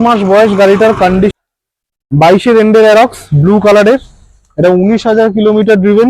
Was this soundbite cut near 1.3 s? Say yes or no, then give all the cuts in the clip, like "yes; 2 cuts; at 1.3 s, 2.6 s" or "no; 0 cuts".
yes; 1 cut; at 1.3 s